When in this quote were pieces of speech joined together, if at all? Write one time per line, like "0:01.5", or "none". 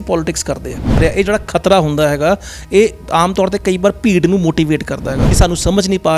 0:01.0
0:05.2